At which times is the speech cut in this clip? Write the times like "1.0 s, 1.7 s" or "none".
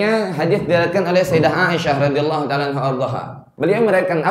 3.4 s

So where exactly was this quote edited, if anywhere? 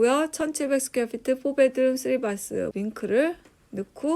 2.7 s

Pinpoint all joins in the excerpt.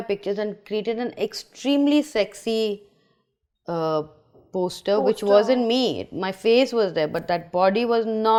none

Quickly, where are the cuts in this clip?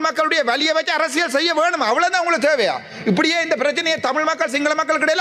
none

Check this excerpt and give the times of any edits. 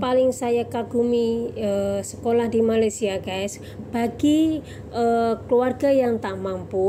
none

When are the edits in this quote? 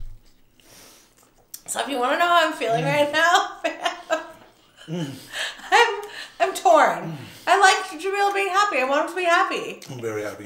none

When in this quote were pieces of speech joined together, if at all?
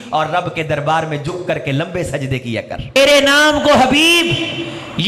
2.9 s

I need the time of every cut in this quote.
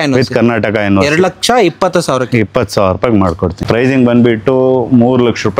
3.6 s

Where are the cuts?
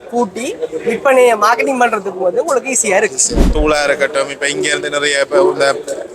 3.5 s

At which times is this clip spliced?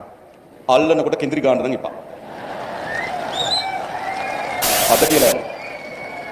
4.6 s

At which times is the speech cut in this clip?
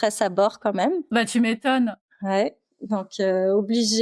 none

